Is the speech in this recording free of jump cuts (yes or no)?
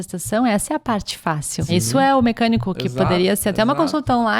no